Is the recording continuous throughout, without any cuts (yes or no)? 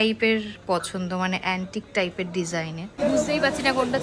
no